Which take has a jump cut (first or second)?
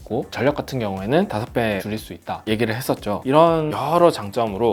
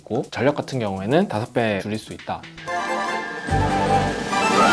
second